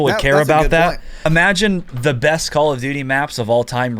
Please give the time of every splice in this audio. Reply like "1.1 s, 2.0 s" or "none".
1.1 s

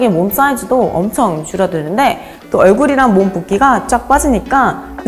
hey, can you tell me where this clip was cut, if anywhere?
2.4 s

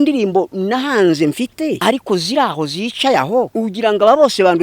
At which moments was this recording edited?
1.8 s, 3.5 s

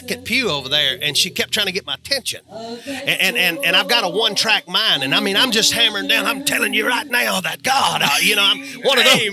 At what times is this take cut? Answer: none

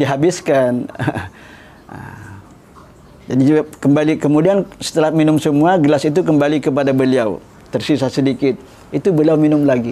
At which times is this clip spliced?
none

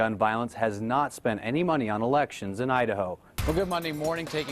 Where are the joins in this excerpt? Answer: 3.3 s

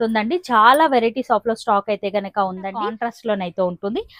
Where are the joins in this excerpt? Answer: 3.0 s

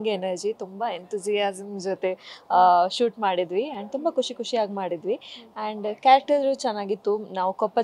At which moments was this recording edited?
none

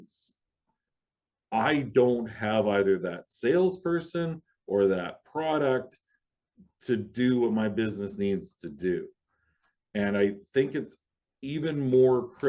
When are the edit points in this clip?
none

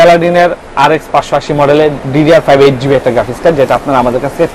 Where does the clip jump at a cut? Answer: 2.0 s

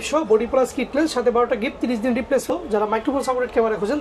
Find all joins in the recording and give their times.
2.5 s

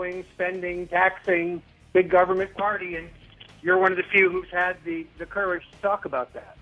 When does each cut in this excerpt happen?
3.5 s

